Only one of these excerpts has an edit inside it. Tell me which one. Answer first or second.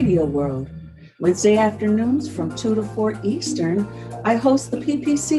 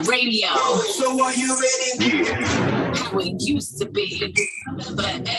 first